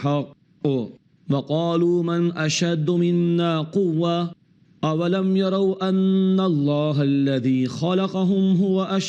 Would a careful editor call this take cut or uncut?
uncut